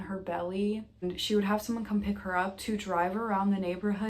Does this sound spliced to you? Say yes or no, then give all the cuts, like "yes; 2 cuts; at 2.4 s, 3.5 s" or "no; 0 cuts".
yes; 1 cut; at 1.0 s